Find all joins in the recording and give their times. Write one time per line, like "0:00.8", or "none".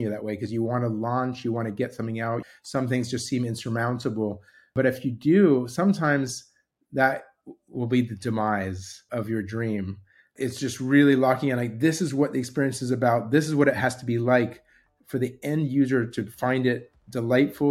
0:02.4
0:04.7
0:09.0
0:10.3